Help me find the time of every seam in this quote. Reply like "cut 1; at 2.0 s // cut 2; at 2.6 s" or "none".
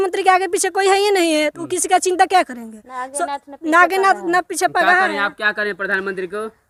none